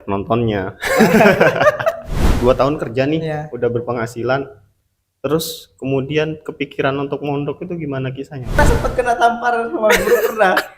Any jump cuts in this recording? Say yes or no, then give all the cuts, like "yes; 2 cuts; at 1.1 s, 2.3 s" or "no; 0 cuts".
yes; 2 cuts; at 2.2 s, 8.6 s